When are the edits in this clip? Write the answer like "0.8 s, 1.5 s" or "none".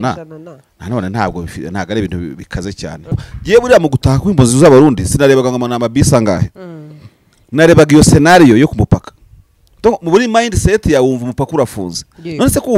3.3 s